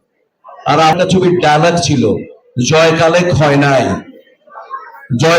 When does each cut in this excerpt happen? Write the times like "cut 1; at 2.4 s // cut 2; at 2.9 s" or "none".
cut 1; at 0.9 s